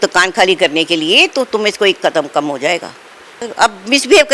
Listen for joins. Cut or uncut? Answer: cut